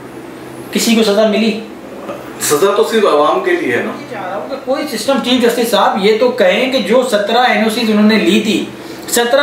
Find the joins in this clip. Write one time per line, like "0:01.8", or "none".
0:04.4

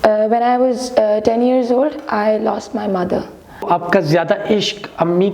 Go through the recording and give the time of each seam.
0:03.7

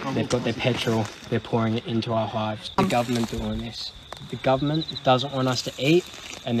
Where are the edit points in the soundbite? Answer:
0:02.6

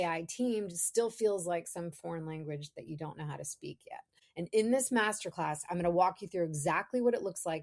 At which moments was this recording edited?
0:04.2

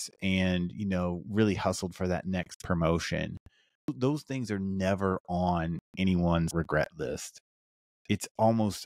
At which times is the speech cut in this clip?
0:03.9
0:06.5

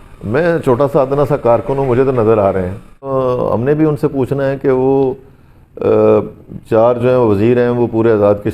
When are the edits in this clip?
0:03.1

